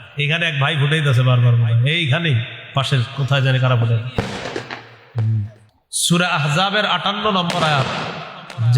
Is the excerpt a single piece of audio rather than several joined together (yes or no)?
no